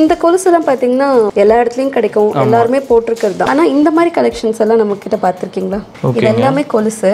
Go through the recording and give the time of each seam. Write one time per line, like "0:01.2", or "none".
0:01.3
0:03.5
0:05.9